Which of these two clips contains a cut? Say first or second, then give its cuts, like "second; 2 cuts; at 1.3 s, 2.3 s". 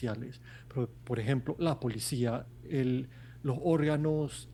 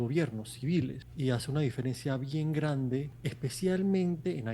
second; 2 cuts; at 1.0 s, 3.2 s